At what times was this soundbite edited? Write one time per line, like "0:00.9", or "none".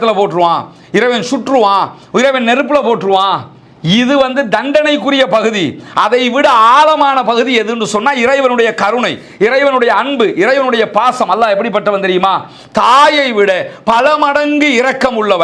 none